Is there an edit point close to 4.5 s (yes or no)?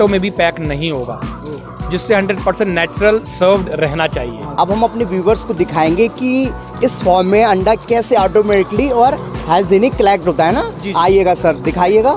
no